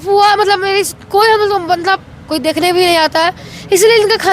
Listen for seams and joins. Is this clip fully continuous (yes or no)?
yes